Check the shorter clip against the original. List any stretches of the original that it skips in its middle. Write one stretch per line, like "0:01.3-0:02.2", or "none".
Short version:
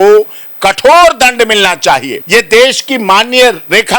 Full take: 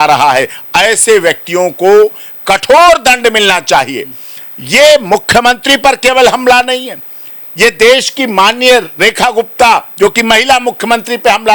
0:04.0-0:07.4